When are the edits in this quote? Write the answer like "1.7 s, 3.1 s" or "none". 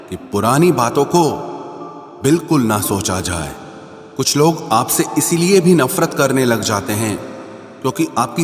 3.5 s